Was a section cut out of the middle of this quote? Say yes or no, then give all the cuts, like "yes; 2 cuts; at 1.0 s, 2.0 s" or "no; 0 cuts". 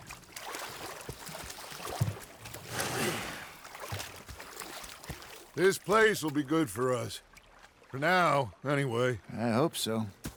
no; 0 cuts